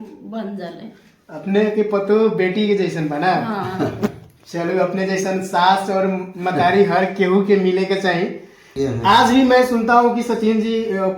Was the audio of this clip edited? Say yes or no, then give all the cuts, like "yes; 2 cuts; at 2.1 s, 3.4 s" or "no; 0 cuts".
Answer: yes; 1 cut; at 8.6 s